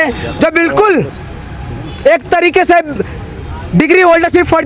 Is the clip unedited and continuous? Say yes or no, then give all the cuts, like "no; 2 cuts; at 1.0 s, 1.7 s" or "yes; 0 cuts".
yes; 0 cuts